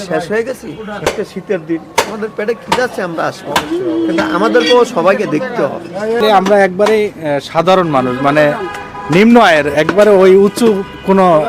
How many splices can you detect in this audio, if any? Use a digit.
2